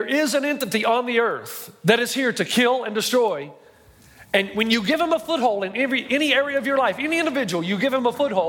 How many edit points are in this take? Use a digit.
0